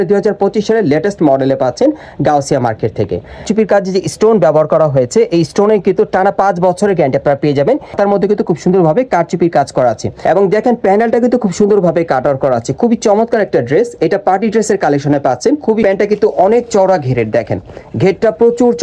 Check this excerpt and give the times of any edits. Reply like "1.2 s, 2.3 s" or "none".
3.5 s, 7.9 s, 10.1 s, 15.8 s

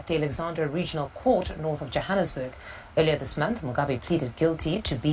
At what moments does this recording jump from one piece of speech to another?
2.8 s

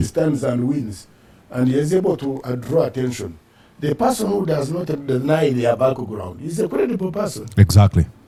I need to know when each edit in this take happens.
none

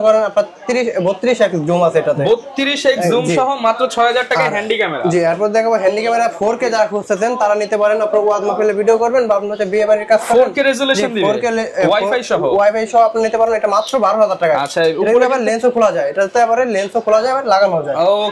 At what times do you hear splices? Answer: none

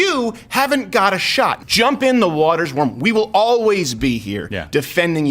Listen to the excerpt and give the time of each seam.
1.6 s

